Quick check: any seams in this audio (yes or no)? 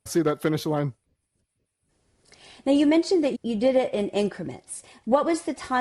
no